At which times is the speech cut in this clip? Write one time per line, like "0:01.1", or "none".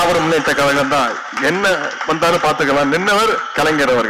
none